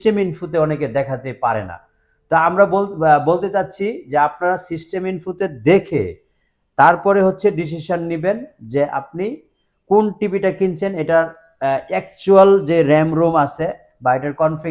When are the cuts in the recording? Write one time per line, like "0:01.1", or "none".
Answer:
none